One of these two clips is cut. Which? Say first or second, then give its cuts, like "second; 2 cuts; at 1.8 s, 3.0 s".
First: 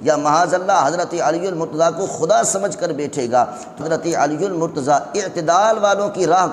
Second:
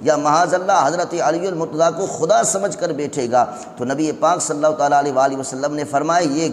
first; 1 cut; at 3.8 s